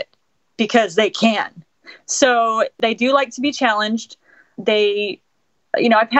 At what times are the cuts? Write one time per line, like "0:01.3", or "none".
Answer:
0:02.7